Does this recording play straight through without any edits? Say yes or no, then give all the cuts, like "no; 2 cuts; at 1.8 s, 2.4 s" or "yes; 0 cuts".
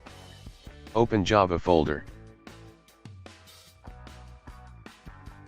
no; 2 cuts; at 0.9 s, 2.0 s